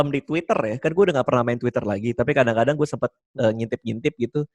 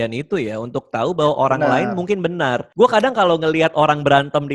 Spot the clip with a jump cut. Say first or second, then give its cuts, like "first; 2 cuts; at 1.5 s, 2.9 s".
second; 1 cut; at 2.6 s